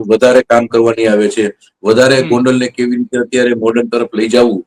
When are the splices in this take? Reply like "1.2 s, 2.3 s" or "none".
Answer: none